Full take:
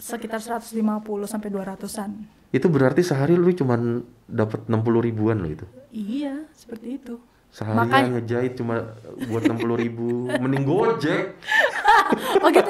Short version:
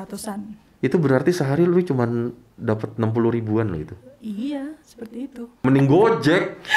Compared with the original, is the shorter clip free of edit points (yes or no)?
no